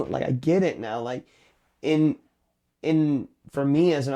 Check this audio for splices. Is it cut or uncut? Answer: uncut